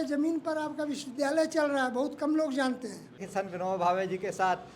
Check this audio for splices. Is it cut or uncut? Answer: cut